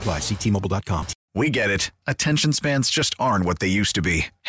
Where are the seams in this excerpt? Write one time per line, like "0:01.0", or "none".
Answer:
0:01.2